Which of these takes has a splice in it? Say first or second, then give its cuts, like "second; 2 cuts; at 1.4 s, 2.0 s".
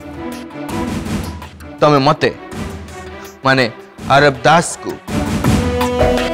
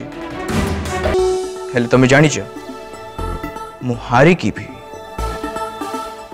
second; 1 cut; at 1.1 s